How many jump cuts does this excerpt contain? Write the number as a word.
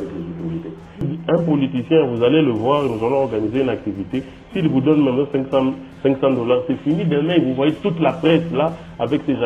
one